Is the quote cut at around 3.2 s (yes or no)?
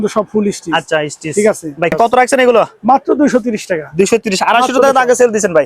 no